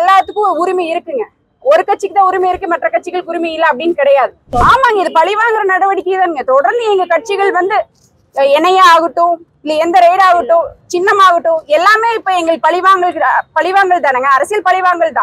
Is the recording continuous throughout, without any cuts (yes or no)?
no